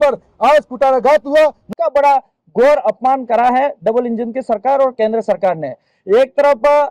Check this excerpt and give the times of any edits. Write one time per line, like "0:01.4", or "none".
0:01.7